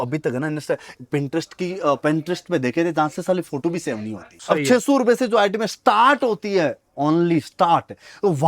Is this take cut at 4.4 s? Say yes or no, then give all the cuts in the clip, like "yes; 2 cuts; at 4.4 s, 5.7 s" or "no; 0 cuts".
yes; 1 cut; at 4.4 s